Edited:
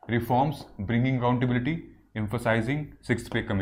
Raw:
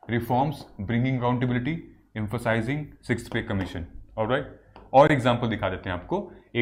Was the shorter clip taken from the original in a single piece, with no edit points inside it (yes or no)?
yes